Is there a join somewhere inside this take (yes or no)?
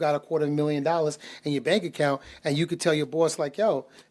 no